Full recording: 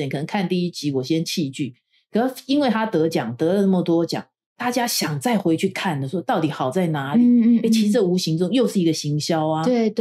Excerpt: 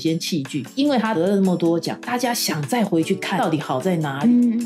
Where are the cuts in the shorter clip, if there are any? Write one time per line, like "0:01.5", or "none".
0:01.0
0:02.0
0:03.4